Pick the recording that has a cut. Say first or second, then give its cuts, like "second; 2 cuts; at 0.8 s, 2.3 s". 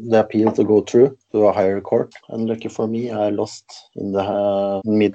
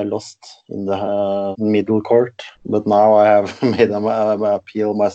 first; 1 cut; at 1.2 s